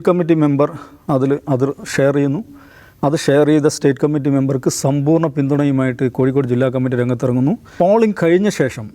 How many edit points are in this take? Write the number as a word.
one